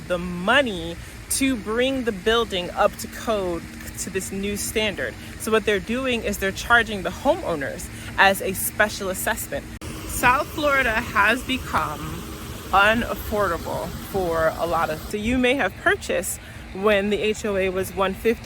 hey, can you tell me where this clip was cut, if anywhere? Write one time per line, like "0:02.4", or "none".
0:09.8
0:15.0